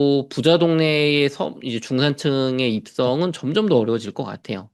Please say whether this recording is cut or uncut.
uncut